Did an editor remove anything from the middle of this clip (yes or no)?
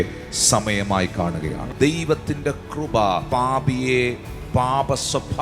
yes